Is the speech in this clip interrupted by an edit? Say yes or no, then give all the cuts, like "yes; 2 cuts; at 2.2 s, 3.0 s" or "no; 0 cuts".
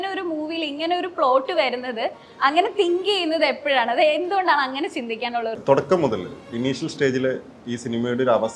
yes; 1 cut; at 5.6 s